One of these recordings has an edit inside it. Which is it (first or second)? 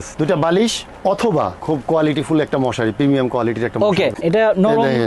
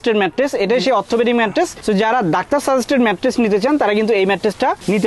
first